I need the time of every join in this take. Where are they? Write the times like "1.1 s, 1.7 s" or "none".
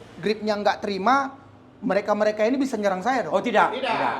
none